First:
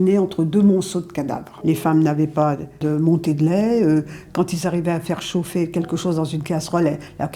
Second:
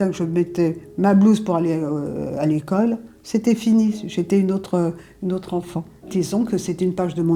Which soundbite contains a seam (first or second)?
first